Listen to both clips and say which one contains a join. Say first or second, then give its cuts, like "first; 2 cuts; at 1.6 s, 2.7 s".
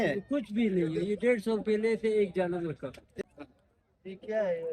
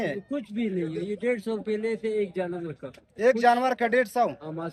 first; 1 cut; at 3.2 s